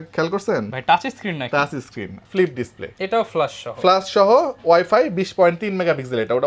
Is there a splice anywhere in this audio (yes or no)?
yes